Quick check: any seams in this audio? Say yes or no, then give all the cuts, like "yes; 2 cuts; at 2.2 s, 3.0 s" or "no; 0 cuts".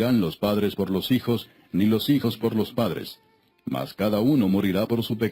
no; 0 cuts